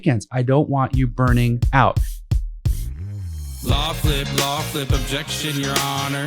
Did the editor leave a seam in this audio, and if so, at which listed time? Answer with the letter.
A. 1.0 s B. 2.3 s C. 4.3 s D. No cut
B